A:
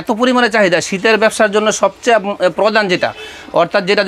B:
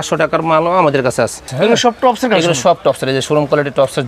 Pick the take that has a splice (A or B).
B